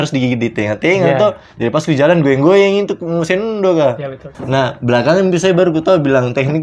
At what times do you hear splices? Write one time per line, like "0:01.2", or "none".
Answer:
0:04.4